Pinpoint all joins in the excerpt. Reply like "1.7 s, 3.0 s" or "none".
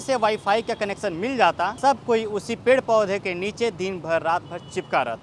1.8 s